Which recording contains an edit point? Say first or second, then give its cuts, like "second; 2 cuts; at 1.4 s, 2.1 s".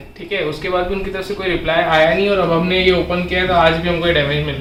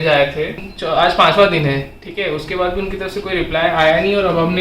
second; 1 cut; at 0.9 s